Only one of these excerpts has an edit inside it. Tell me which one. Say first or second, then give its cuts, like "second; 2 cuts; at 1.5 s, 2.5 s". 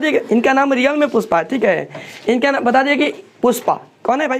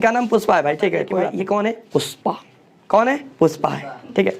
second; 1 cut; at 1.2 s